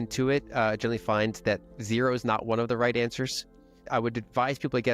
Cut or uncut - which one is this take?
cut